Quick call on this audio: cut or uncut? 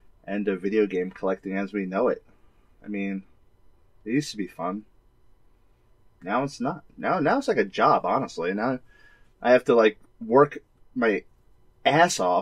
uncut